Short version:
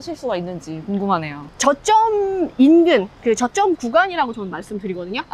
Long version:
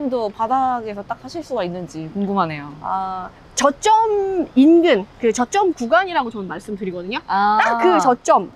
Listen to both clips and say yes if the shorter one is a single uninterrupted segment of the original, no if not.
no